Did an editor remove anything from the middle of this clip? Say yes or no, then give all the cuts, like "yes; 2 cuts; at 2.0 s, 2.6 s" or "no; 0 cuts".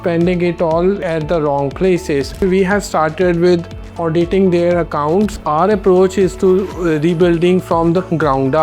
yes; 2 cuts; at 2.4 s, 5.3 s